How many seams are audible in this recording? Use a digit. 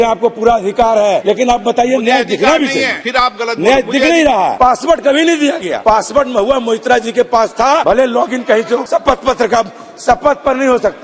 6